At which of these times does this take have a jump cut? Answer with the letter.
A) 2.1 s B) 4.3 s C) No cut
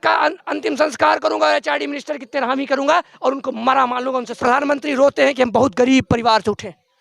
B